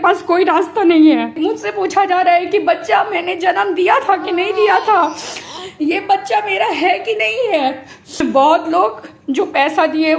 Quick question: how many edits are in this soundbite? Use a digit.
2